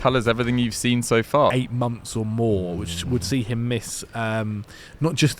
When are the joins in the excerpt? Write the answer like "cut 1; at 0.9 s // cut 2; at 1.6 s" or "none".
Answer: cut 1; at 1.5 s